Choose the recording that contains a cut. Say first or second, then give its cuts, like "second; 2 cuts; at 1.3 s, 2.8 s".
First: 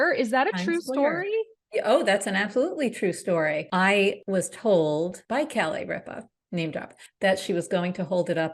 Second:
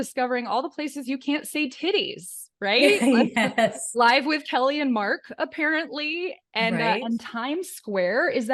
first; 3 cuts; at 4.0 s, 5.2 s, 7.0 s